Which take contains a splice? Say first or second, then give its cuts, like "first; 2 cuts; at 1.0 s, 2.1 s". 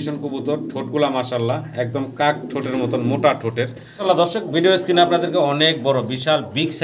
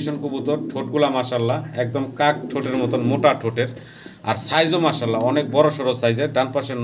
first; 1 cut; at 3.8 s